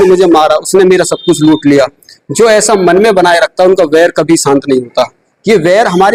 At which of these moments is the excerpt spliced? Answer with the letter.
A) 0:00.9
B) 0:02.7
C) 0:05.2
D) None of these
D